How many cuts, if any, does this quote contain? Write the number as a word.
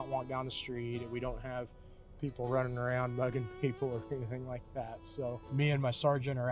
one